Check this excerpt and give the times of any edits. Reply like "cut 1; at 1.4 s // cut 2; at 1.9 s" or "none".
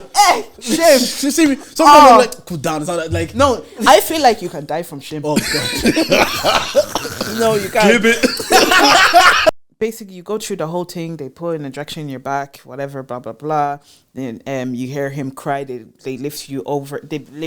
cut 1; at 9.5 s